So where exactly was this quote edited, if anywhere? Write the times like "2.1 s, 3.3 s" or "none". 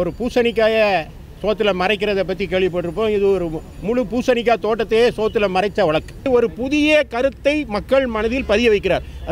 6.3 s